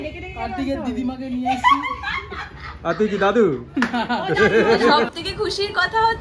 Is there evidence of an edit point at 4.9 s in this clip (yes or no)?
yes